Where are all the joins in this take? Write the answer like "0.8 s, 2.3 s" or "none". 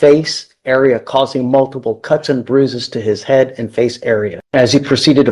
4.4 s